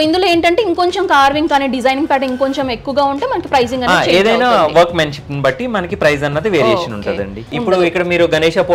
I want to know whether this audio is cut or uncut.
cut